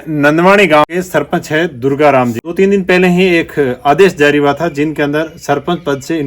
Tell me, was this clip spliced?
yes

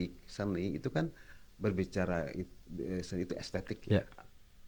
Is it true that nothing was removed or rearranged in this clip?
yes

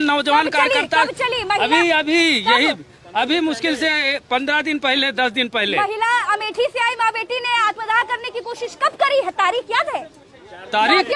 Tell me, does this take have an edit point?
no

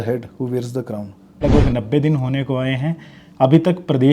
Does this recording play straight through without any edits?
no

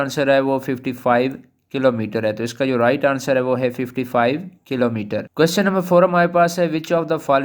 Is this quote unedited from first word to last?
no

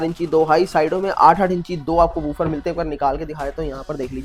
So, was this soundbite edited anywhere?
no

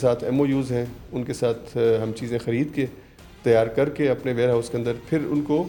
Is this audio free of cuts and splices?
yes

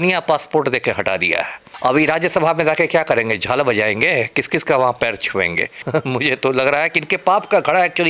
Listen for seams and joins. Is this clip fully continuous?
no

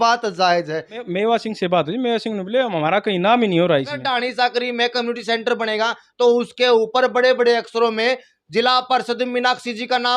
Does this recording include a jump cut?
yes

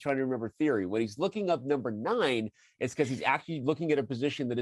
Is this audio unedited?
yes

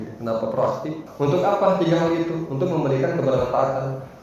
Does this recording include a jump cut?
yes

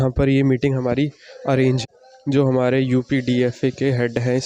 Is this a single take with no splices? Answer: no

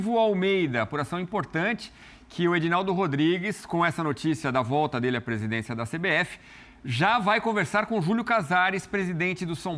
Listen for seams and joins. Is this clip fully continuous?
yes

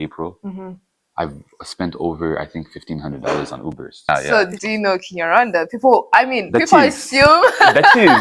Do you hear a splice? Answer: yes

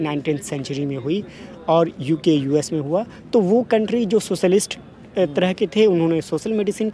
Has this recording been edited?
no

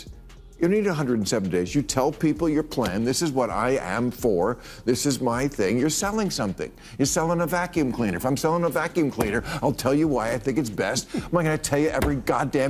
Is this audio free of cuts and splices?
yes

